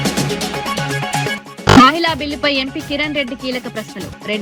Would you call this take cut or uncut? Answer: uncut